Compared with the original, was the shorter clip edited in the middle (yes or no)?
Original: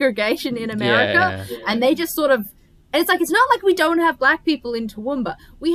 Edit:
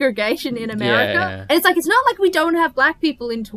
yes